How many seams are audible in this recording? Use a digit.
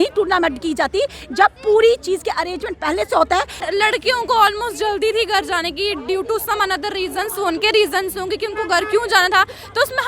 1